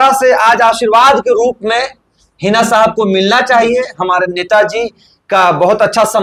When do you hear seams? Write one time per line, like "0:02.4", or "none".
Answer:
none